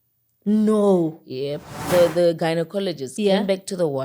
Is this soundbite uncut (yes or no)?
no